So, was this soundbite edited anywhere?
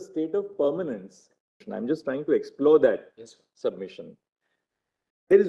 yes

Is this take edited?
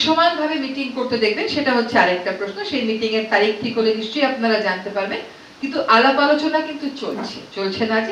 no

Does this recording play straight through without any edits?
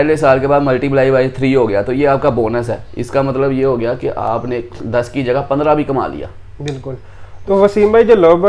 yes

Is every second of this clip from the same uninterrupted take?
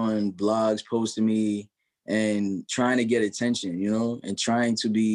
yes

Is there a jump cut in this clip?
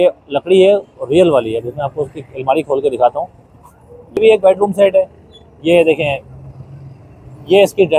yes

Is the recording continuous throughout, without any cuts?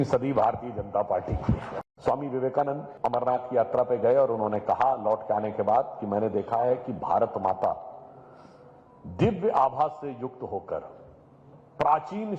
no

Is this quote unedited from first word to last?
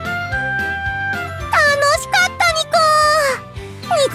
no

